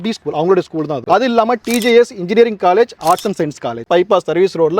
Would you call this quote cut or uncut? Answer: cut